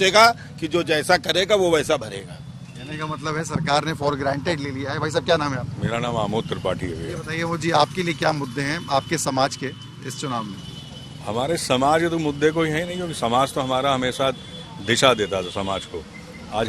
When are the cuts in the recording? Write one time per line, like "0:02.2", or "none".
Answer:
none